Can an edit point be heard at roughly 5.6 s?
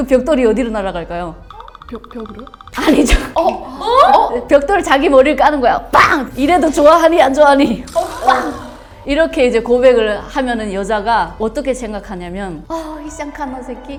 no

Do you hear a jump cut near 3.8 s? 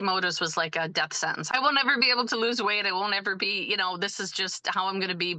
no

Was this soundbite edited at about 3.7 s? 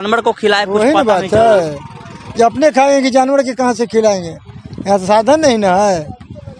no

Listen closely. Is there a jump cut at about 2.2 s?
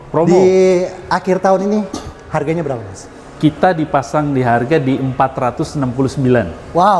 no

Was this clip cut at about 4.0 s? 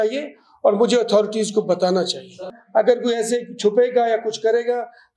no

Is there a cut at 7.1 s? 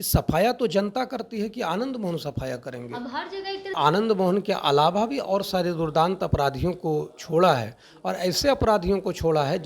no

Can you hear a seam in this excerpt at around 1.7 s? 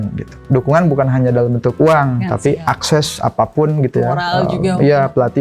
yes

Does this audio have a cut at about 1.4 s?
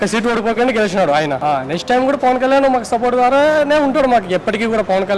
yes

